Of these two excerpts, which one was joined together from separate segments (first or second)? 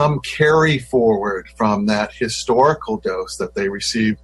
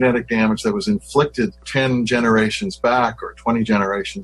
second